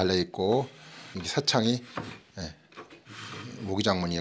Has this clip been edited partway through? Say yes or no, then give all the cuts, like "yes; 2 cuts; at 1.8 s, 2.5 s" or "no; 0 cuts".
yes; 1 cut; at 1.2 s